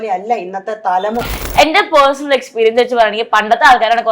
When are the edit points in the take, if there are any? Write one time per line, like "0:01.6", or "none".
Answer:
0:01.2